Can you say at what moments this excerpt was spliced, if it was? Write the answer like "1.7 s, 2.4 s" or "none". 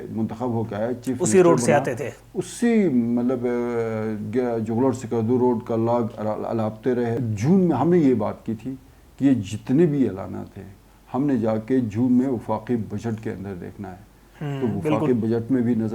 7.2 s